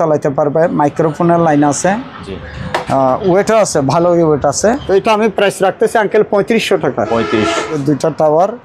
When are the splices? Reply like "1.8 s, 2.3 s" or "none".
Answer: 4.8 s, 7.8 s